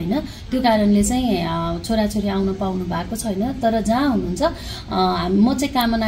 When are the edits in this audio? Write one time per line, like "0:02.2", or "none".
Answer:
none